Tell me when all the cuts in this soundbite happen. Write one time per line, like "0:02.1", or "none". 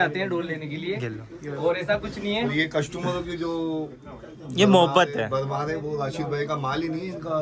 none